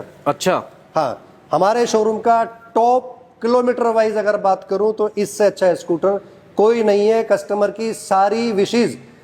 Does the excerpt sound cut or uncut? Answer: uncut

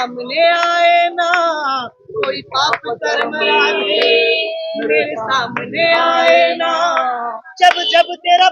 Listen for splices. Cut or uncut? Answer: uncut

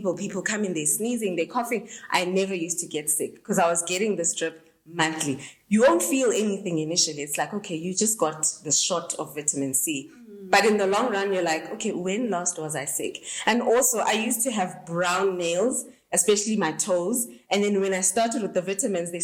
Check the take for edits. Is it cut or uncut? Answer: uncut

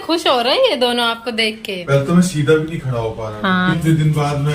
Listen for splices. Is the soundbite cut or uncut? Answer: cut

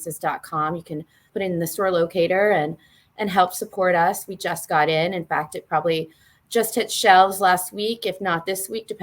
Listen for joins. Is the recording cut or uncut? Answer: cut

